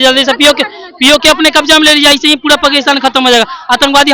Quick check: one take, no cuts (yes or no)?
yes